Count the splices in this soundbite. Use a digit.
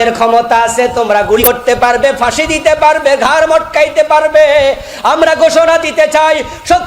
1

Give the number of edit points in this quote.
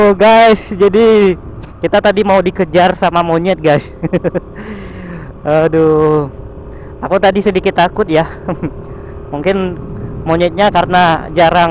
1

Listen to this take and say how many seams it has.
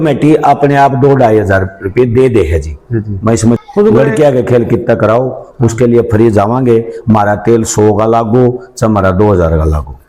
1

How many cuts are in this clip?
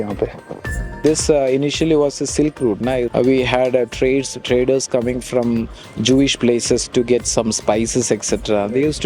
2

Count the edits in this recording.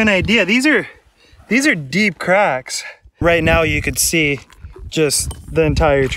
1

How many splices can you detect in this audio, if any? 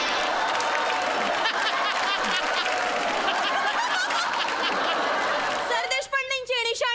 1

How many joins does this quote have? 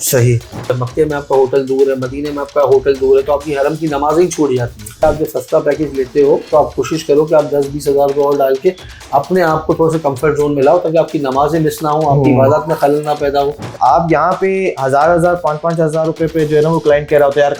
3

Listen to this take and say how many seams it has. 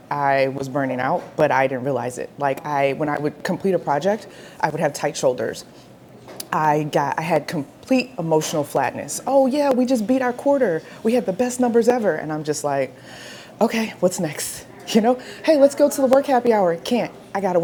0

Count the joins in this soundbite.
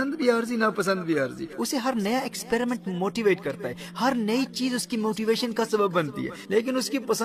0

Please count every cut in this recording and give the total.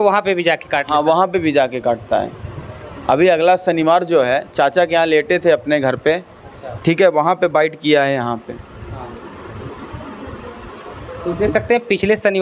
0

